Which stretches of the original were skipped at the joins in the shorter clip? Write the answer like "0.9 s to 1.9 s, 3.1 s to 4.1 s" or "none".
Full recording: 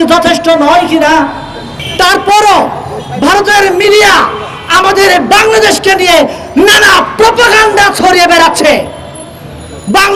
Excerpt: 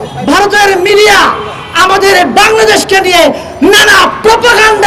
none

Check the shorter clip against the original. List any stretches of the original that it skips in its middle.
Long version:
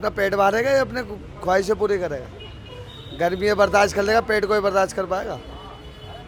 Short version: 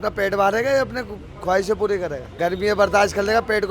2.2 s to 3.0 s

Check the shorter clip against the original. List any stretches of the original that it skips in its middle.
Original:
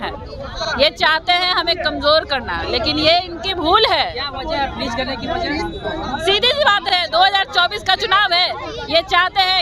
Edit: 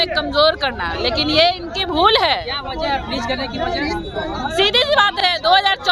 none

